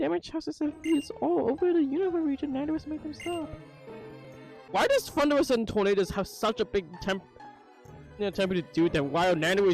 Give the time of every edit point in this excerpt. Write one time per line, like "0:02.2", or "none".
0:04.5